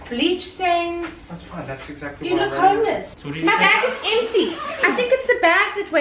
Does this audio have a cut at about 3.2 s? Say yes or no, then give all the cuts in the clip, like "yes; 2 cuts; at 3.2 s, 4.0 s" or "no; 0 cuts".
yes; 1 cut; at 3.2 s